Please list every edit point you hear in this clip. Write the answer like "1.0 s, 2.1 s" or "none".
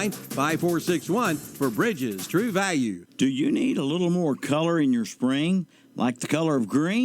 2.3 s